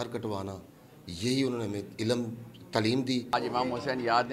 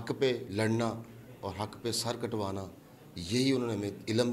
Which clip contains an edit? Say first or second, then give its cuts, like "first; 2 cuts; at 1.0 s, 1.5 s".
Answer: first; 1 cut; at 3.3 s